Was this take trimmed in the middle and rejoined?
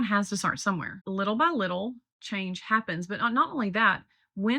yes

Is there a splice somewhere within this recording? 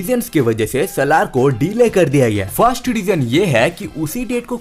no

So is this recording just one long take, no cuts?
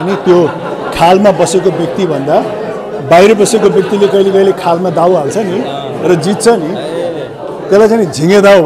yes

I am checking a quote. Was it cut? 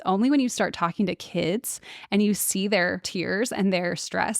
yes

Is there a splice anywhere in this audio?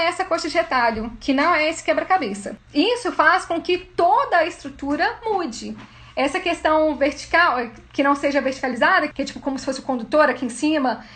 yes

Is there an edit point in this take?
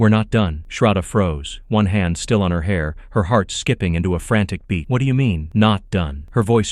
no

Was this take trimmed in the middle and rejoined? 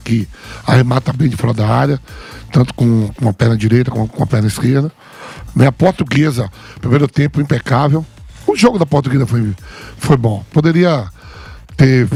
no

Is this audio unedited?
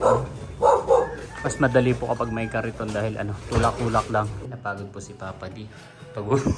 no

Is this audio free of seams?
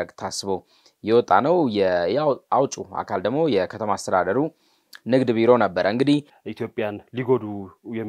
no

